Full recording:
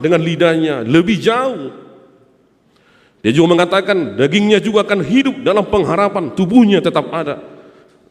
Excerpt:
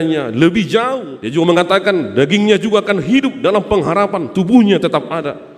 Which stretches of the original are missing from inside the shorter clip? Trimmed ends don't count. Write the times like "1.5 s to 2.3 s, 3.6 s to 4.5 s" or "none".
1.7 s to 3.2 s